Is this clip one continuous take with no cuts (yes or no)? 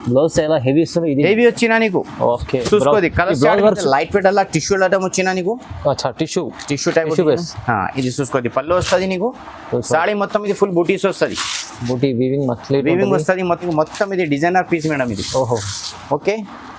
no